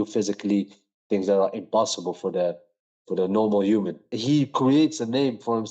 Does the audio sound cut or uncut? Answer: cut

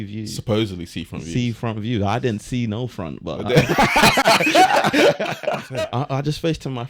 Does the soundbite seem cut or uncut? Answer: cut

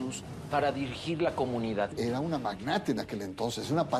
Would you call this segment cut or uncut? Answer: cut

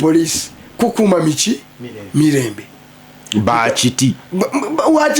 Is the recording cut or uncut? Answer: uncut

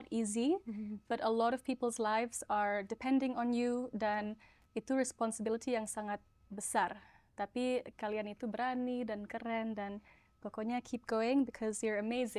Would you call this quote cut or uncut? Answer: uncut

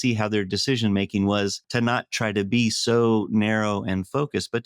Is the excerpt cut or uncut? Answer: cut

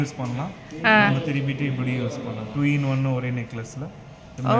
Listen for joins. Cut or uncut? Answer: uncut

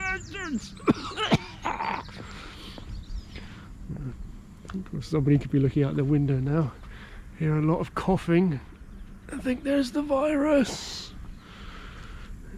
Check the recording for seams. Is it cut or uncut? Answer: uncut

